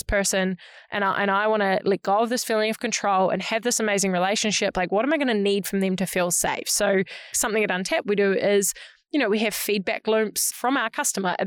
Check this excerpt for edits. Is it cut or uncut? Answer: cut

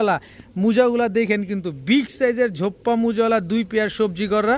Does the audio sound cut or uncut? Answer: uncut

